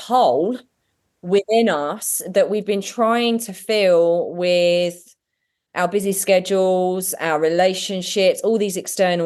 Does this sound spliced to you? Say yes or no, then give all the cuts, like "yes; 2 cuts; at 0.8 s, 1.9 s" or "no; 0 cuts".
no; 0 cuts